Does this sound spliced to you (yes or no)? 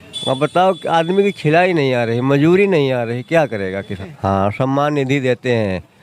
yes